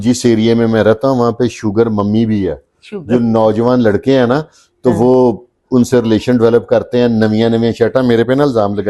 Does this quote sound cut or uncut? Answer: uncut